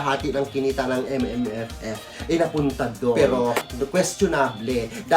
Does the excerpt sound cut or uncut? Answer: cut